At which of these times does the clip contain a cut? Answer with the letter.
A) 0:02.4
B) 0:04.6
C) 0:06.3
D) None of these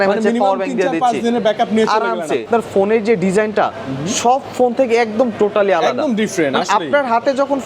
A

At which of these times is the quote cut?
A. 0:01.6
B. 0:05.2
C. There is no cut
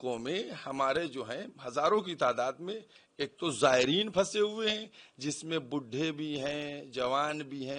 C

